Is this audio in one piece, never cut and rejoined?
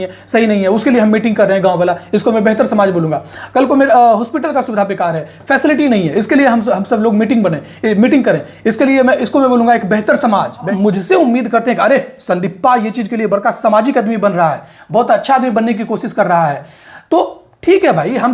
no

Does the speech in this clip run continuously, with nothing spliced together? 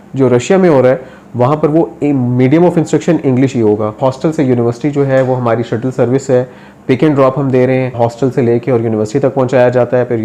no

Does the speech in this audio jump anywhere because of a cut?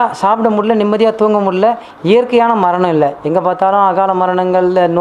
no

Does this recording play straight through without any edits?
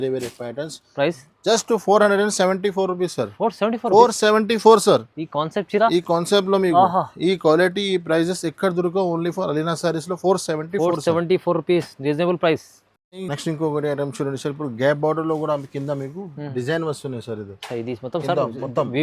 yes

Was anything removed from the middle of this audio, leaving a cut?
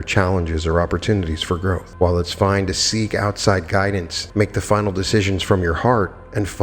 yes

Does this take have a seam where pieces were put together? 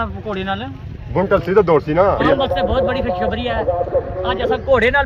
yes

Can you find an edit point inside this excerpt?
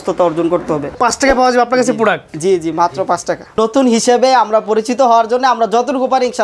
yes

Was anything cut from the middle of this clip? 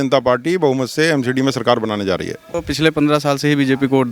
yes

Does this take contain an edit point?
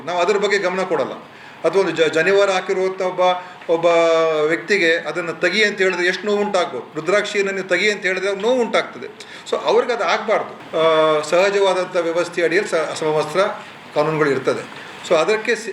yes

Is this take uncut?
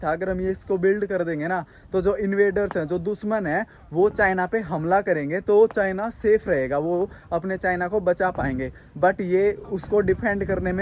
yes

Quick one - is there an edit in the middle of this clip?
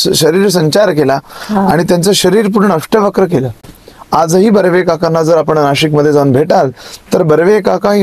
no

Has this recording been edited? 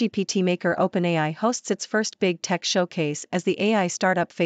no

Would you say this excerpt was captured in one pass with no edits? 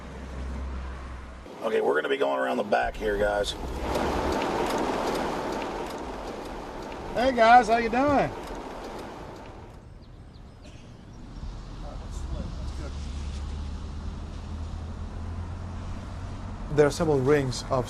yes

